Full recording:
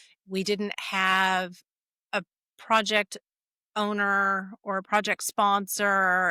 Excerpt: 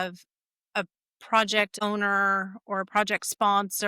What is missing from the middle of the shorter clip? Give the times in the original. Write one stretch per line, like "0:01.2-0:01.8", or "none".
0:03.1-0:03.7